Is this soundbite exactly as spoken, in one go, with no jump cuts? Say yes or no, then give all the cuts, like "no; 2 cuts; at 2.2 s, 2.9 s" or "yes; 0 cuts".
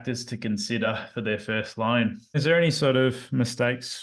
no; 1 cut; at 2.4 s